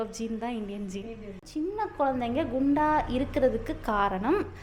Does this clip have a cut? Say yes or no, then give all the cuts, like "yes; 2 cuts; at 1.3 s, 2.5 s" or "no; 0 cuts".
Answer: yes; 1 cut; at 1.4 s